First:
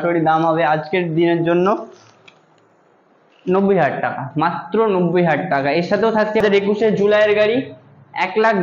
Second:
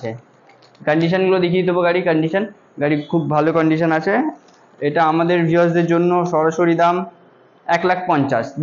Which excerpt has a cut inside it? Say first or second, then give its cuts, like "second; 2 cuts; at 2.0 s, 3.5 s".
first; 1 cut; at 6.4 s